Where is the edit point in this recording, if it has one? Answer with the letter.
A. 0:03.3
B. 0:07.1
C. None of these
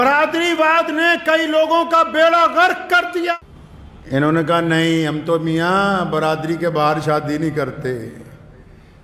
A